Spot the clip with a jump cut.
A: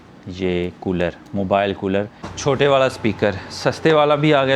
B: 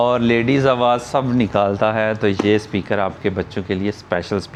A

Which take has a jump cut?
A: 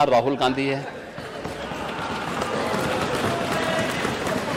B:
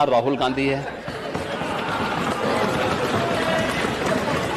B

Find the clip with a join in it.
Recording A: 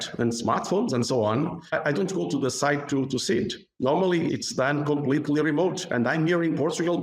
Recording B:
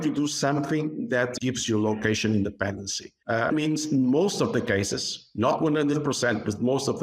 A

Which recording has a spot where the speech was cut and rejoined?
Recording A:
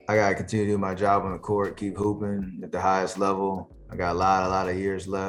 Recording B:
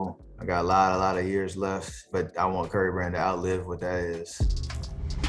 B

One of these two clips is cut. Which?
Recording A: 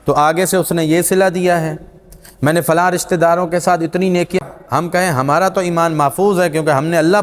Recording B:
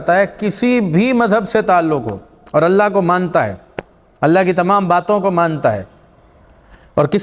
A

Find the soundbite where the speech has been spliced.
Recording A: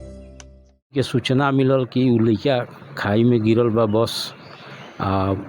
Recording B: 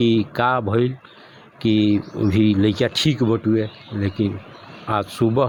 A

